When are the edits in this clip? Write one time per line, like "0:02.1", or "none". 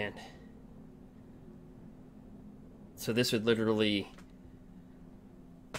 none